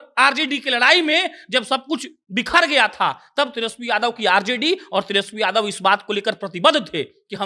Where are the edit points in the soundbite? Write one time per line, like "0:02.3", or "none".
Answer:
none